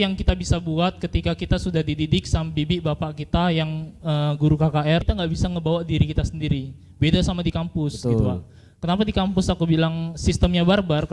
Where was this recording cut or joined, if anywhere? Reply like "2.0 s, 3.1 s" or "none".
5.1 s